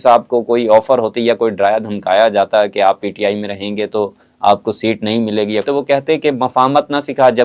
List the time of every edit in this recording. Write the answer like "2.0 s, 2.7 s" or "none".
5.7 s